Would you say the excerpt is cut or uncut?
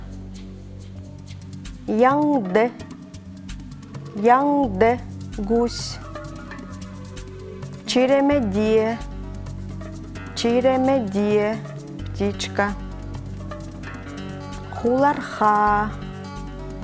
cut